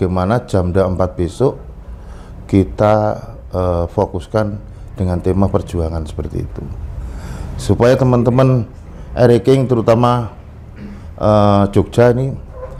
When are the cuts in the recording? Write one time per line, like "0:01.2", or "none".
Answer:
none